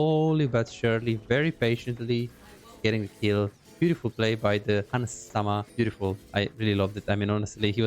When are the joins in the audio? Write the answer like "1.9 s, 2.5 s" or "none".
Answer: 5.3 s